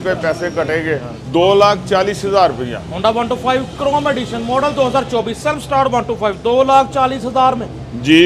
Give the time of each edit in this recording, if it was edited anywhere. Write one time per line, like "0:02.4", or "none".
none